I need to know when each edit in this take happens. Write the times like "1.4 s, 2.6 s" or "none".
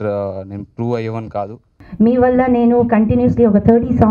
1.8 s